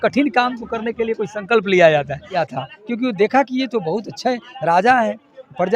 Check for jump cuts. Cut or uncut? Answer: cut